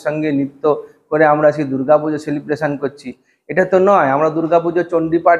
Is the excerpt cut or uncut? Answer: uncut